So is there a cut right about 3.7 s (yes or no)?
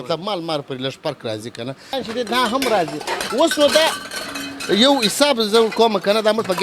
no